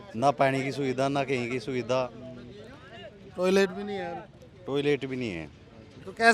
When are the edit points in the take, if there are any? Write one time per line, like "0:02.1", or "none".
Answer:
none